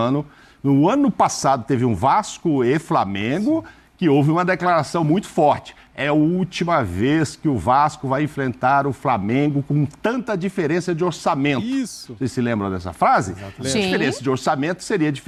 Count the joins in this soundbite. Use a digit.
0